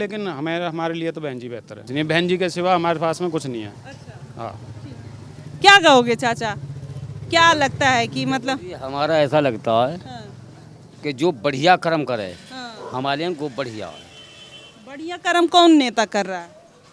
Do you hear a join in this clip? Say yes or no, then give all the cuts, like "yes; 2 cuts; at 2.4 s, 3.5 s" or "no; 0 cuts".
no; 0 cuts